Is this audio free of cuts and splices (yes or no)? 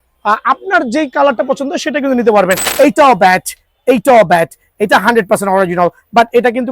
no